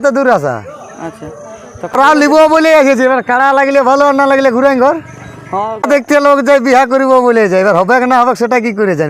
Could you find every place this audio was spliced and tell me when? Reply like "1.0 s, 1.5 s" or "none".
1.9 s, 5.8 s